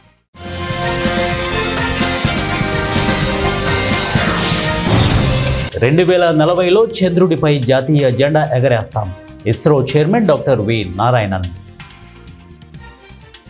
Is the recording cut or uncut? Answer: uncut